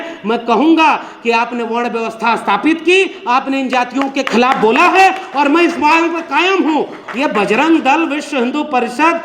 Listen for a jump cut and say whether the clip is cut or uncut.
cut